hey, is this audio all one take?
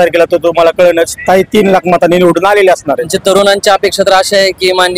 no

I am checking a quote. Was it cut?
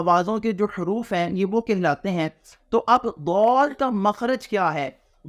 no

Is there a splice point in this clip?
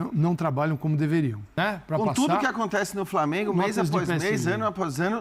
yes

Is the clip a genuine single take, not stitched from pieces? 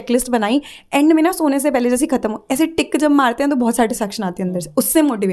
yes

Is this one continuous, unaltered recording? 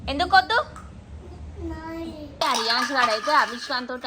no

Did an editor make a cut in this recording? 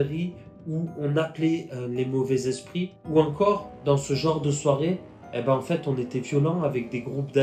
yes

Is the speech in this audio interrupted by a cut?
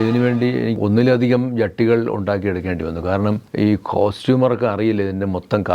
yes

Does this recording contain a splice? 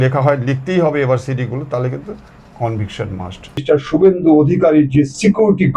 yes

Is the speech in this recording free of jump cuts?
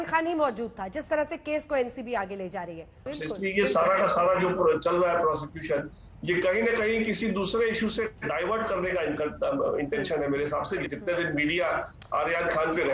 no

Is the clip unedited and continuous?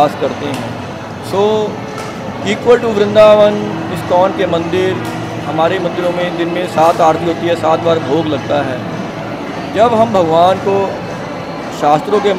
yes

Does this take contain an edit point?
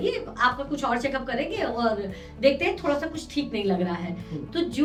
no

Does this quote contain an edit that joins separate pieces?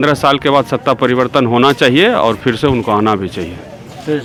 no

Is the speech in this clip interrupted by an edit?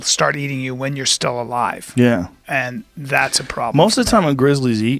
no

